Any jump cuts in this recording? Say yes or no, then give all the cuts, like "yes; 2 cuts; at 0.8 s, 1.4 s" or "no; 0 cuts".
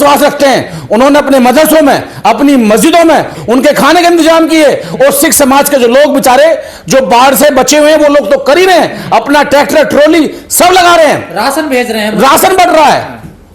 no; 0 cuts